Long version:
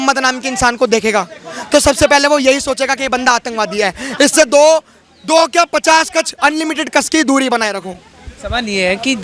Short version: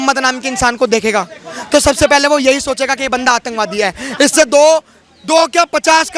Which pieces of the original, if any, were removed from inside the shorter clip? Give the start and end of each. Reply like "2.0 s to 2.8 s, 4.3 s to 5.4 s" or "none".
none